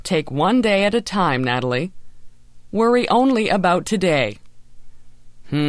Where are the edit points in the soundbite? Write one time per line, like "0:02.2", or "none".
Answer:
none